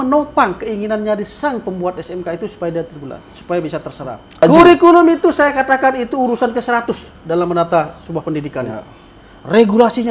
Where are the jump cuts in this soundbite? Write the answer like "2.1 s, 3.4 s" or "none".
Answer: 4.4 s